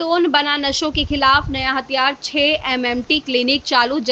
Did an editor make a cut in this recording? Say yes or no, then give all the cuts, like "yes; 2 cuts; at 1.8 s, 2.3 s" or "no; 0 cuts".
no; 0 cuts